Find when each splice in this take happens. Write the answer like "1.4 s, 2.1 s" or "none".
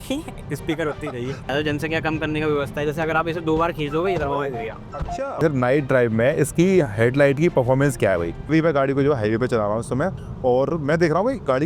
1.5 s, 5.3 s, 8.5 s